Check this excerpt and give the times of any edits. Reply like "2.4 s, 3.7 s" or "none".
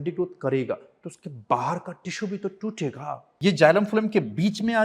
3.3 s